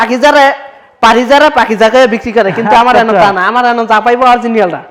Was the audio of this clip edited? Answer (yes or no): no